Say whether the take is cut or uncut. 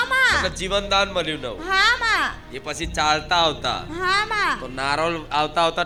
uncut